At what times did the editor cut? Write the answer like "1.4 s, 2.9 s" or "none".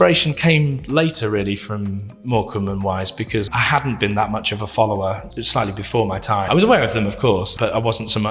3.5 s, 5.2 s, 6.5 s, 7.5 s